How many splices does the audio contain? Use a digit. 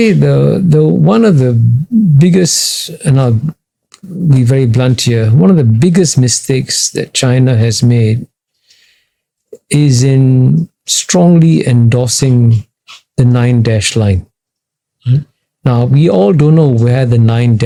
0